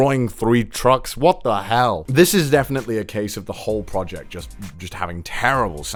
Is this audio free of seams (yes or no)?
yes